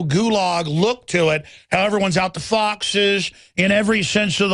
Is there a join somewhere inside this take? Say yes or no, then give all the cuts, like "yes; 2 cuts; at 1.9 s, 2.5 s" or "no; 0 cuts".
no; 0 cuts